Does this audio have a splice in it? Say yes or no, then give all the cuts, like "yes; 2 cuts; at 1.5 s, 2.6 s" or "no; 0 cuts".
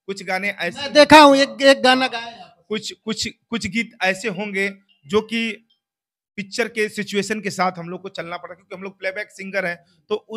no; 0 cuts